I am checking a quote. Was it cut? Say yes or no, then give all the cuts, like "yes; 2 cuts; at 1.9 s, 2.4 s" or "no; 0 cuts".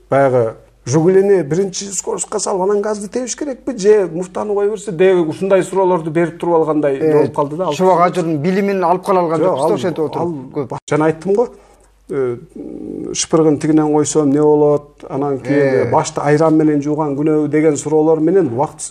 yes; 1 cut; at 10.8 s